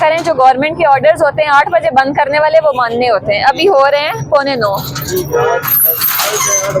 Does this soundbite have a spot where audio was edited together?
no; 0 cuts

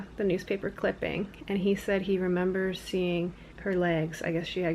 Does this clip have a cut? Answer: yes; 1 cut; at 3.5 s

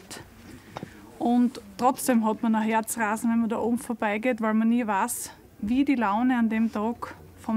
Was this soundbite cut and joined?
no; 0 cuts

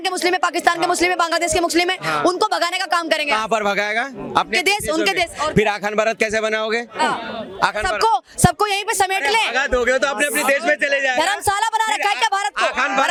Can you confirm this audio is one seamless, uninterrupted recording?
yes; 0 cuts

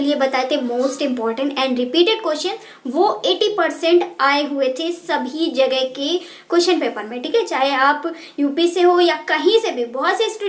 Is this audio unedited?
yes; 0 cuts

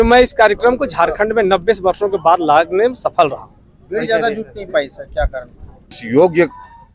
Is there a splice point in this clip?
yes; 1 cut; at 6.0 s

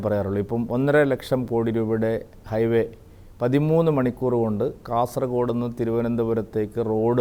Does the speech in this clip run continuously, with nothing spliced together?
yes; 0 cuts

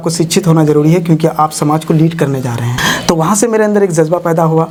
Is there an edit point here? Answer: no; 0 cuts

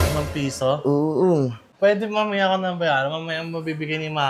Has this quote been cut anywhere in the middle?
yes; 1 cut; at 1.6 s

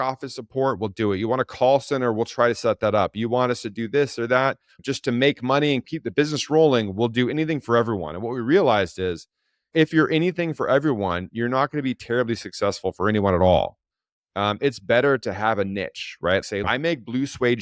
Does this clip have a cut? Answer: yes; 3 cuts; at 4.7 s, 5.9 s, 16.7 s

